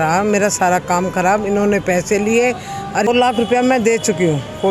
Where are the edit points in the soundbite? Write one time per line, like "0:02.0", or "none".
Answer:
0:03.1